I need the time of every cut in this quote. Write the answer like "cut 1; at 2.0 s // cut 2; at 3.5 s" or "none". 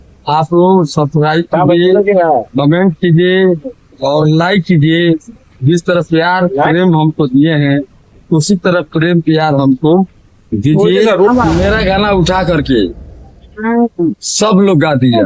cut 1; at 11.3 s

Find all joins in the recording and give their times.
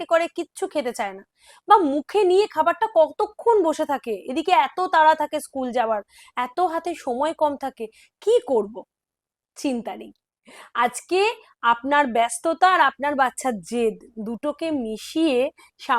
none

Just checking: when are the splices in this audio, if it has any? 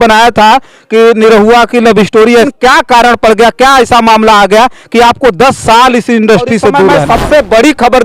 cut 1; at 2.5 s // cut 2; at 7.0 s

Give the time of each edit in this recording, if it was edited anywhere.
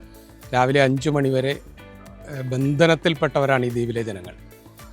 none

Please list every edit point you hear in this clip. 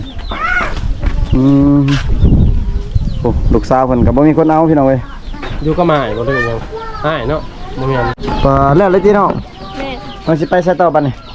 cut 1; at 8.2 s

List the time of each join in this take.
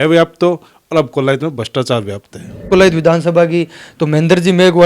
cut 1; at 2.7 s

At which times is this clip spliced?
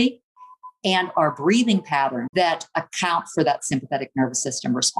cut 1; at 2.2 s

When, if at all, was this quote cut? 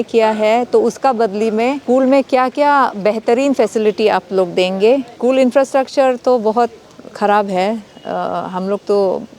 cut 1; at 1.8 s // cut 2; at 5.1 s

